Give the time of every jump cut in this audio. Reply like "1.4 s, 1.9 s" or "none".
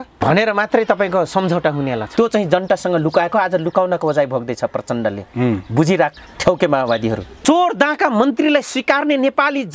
2.1 s, 7.3 s